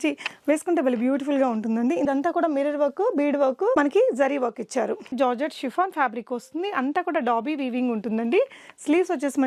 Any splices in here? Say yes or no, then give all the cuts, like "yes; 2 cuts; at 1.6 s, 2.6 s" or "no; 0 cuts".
yes; 2 cuts; at 2.0 s, 5.1 s